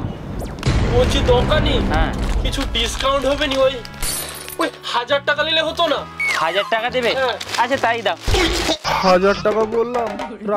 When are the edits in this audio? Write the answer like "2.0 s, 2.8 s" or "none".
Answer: 8.8 s

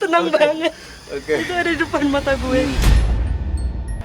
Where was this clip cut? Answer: 2.8 s

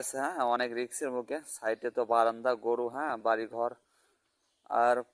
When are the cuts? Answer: none

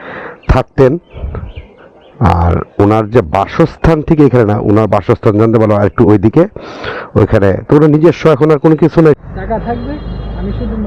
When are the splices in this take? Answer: 9.2 s

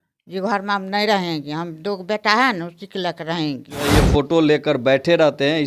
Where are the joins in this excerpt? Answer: 3.9 s

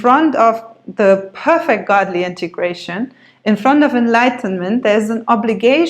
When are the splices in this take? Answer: none

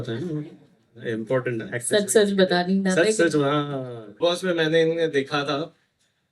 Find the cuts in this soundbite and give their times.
4.0 s

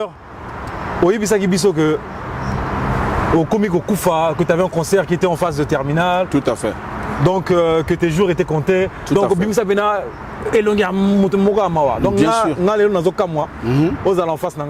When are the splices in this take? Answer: none

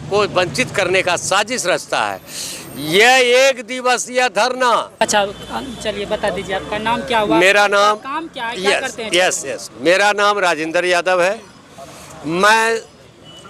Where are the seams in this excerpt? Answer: 5.0 s

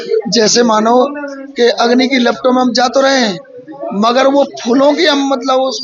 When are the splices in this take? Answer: none

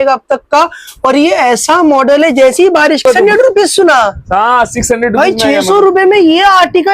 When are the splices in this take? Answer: 3.0 s

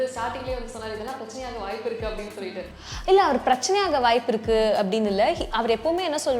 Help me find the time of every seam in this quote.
2.7 s

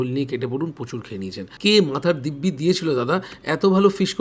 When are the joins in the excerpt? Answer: 1.4 s

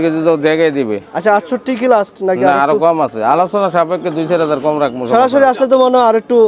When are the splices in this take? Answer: none

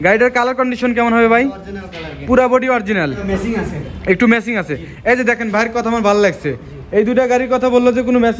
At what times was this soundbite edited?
3.2 s

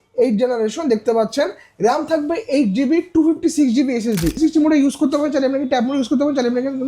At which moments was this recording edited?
4.4 s

